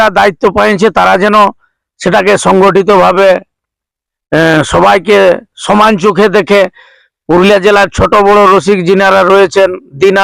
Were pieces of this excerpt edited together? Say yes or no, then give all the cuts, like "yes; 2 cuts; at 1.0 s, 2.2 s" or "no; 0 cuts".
no; 0 cuts